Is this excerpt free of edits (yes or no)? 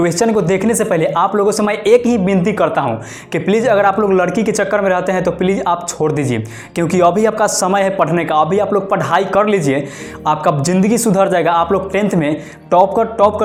yes